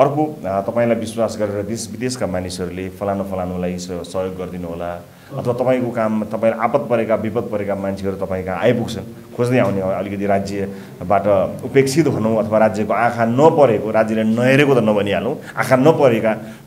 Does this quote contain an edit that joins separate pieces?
no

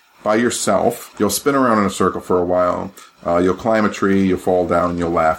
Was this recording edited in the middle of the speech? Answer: yes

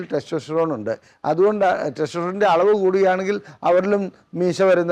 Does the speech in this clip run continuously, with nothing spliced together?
yes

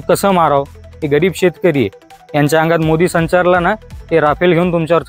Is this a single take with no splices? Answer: no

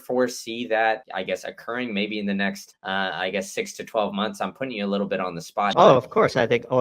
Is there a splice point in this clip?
yes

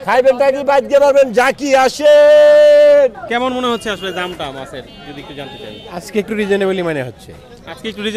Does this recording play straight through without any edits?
no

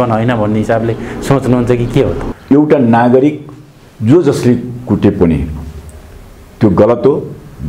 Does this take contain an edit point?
yes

